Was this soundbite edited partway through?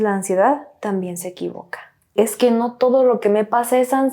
yes; 1 cut; at 2.1 s

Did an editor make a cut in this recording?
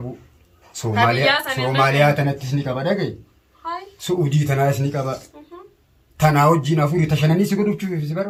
no; 0 cuts

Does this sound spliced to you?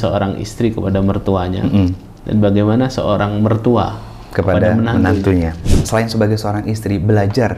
yes; 1 cut; at 5.8 s

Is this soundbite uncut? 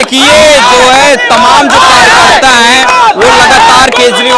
yes; 0 cuts

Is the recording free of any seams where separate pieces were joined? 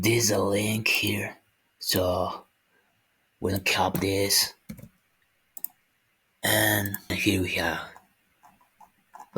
no; 1 cut; at 7.1 s

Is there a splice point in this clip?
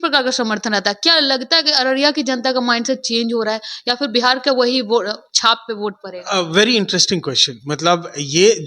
no; 0 cuts

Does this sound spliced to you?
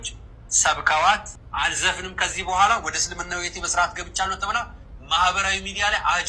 yes; 1 cut; at 1.4 s

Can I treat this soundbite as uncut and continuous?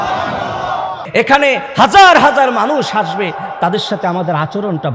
no; 1 cut; at 1.0 s

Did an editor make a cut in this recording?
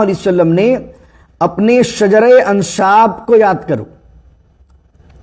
no; 0 cuts

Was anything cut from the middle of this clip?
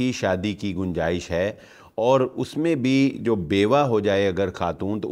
no; 0 cuts

